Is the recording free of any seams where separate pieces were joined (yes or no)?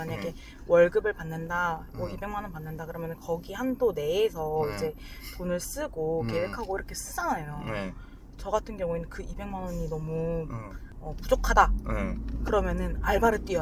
yes